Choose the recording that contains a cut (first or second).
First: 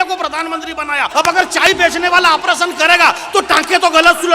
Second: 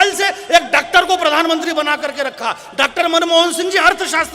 first